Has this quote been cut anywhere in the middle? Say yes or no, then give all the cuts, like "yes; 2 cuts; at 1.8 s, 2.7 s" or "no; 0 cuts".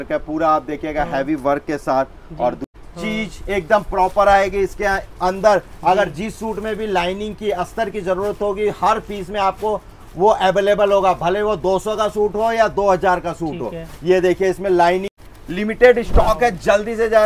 yes; 2 cuts; at 2.6 s, 15.2 s